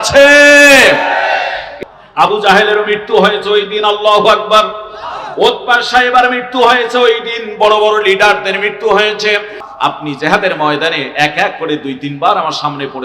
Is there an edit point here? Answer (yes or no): yes